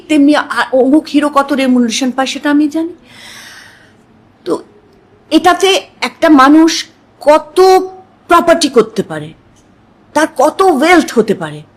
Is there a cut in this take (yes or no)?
no